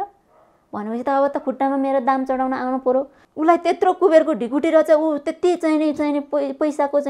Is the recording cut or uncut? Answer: cut